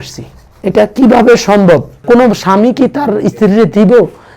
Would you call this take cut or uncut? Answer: cut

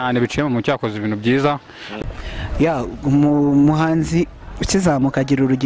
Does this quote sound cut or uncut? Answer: cut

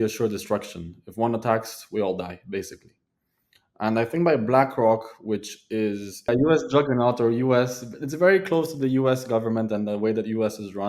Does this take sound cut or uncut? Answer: cut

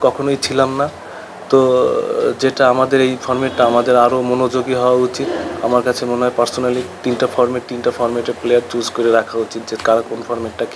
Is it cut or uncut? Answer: uncut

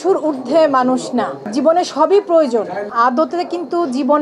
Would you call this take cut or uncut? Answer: cut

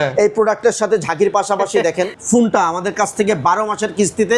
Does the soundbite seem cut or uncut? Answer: cut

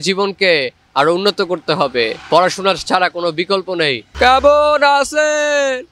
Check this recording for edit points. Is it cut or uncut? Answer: cut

